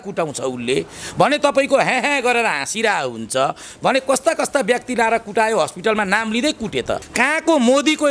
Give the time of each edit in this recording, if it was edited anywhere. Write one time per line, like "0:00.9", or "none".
0:07.1